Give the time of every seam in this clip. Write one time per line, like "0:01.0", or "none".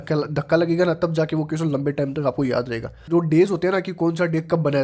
0:03.0